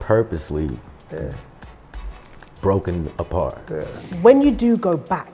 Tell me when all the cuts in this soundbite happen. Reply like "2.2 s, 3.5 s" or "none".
4.0 s